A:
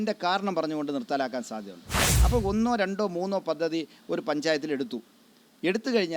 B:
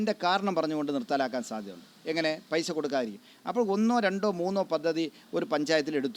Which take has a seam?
A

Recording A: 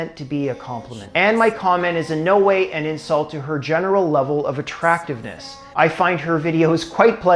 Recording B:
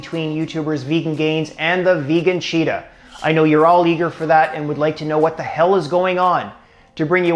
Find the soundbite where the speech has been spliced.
A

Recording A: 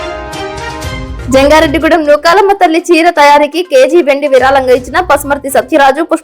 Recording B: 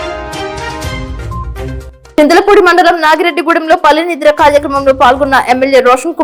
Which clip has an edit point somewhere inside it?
A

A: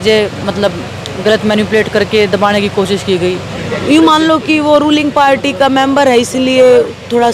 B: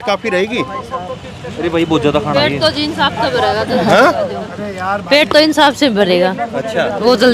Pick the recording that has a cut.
A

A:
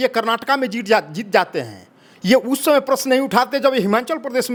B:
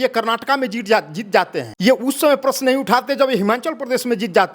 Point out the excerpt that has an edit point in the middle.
B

